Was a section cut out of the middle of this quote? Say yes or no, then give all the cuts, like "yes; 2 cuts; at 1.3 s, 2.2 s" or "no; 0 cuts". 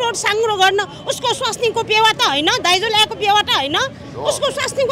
no; 0 cuts